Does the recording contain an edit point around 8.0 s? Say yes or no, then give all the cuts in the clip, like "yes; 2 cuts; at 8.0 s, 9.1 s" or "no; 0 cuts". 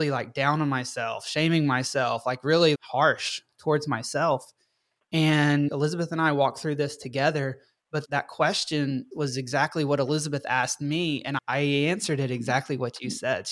yes; 3 cuts; at 2.8 s, 8.0 s, 11.3 s